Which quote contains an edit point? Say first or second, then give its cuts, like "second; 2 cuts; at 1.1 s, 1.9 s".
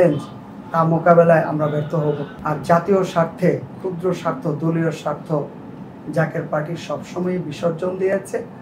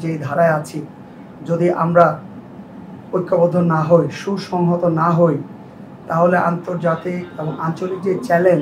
first; 1 cut; at 2.3 s